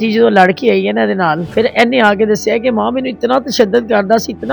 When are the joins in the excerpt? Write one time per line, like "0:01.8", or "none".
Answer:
0:01.4